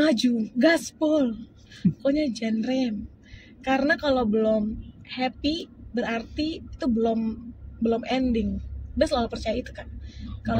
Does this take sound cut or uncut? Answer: uncut